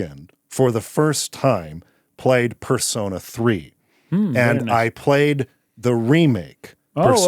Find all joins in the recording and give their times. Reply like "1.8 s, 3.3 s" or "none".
none

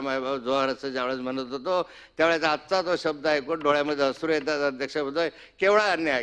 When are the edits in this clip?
none

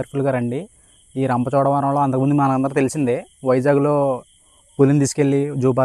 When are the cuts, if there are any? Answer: none

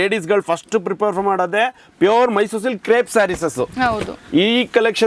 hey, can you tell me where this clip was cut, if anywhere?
none

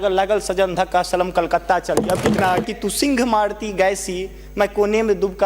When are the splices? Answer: 2.6 s

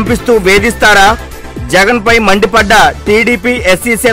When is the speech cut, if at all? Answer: none

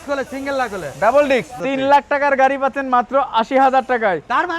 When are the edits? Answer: 1.5 s

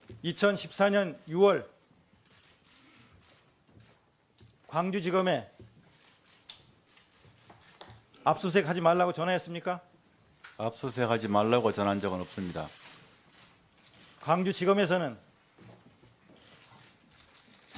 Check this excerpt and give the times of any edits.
11.0 s

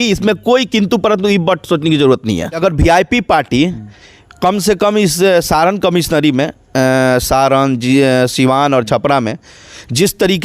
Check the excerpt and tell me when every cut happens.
2.6 s

